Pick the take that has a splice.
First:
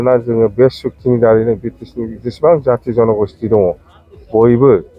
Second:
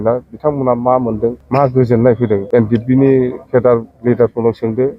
second; 2 cuts; at 1.4 s, 2.4 s

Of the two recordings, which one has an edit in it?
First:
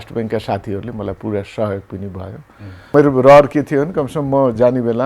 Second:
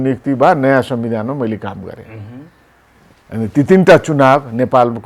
first; 1 cut; at 2.9 s

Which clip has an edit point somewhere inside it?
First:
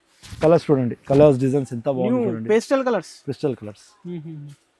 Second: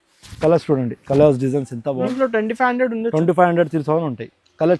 second; 1 cut; at 2.1 s

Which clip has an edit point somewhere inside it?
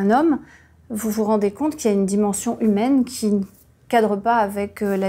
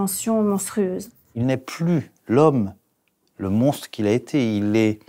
second; 1 cut; at 1.2 s

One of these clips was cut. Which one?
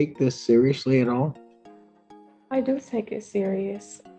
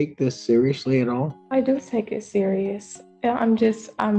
second; 1 cut; at 1.4 s

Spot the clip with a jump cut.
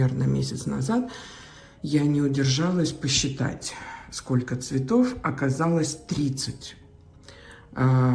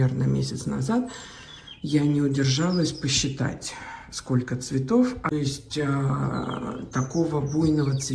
second; 1 cut; at 5.3 s

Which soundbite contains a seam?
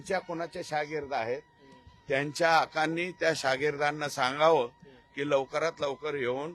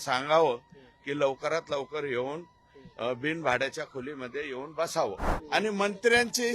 second; 1 cut; at 5.3 s

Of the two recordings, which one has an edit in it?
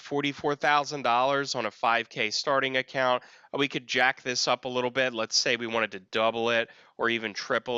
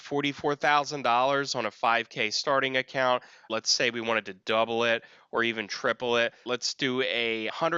second; 2 cuts; at 3.5 s, 6.4 s

